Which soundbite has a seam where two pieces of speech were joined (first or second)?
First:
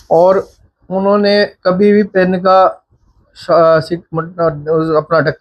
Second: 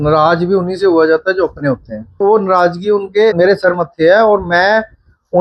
second